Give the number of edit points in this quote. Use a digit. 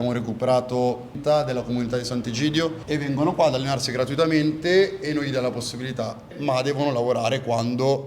3